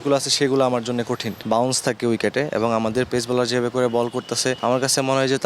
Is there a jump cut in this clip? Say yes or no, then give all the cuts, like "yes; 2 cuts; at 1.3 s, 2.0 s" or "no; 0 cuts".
yes; 2 cuts; at 1.3 s, 4.6 s